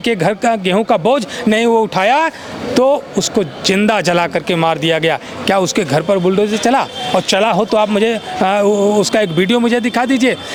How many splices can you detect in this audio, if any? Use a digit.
0